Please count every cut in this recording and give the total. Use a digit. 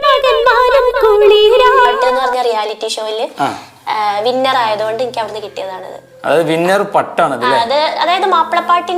1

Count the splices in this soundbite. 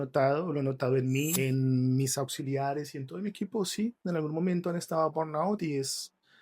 1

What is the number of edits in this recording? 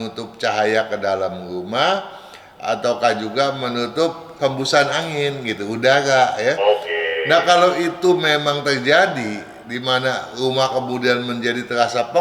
0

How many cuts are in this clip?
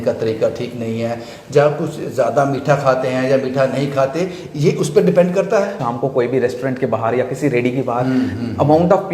1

